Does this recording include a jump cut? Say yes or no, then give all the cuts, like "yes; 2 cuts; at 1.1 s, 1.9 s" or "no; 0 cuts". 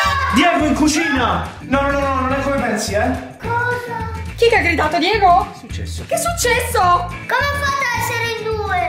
yes; 2 cuts; at 4.2 s, 7.1 s